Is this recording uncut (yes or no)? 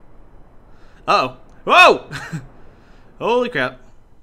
no